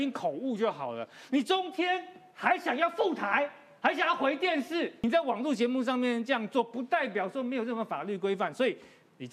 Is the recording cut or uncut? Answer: cut